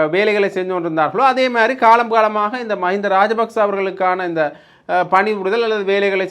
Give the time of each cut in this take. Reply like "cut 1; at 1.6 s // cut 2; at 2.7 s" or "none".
none